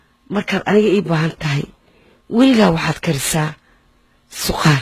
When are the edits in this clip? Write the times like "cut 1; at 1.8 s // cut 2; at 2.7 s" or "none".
none